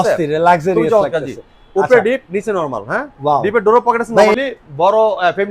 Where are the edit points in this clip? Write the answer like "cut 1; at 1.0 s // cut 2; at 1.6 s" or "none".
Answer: cut 1; at 4.3 s